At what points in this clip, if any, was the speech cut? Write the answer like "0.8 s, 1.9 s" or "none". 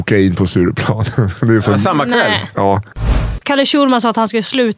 3.3 s